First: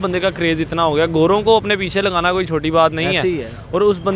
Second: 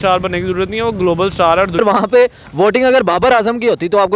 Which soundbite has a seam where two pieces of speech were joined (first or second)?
second